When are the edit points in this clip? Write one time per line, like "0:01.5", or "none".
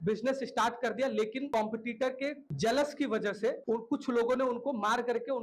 none